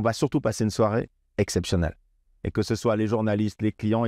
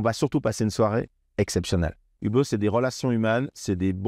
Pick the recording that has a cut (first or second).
second